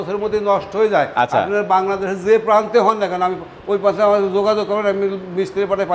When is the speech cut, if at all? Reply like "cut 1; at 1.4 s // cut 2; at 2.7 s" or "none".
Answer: none